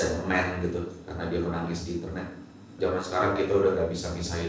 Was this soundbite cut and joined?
yes; 1 cut; at 2.7 s

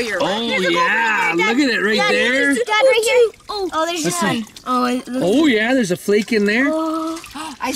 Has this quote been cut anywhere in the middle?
no; 0 cuts

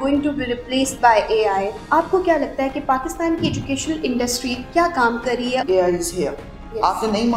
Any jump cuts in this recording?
yes; 3 cuts; at 1.8 s, 4.6 s, 5.6 s

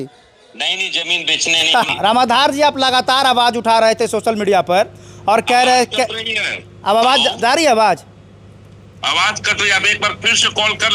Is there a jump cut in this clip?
yes; 1 cut; at 1.9 s

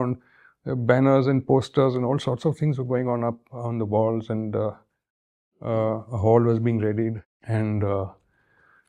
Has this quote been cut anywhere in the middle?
yes; 1 cut; at 7.3 s

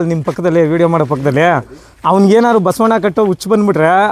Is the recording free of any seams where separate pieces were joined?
yes; 0 cuts

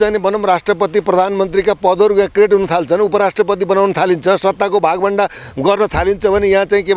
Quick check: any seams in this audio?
no; 0 cuts

